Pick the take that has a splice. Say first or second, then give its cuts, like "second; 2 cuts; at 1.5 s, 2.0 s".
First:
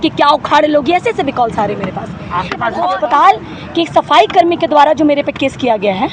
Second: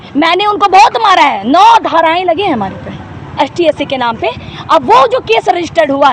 first; 1 cut; at 2.8 s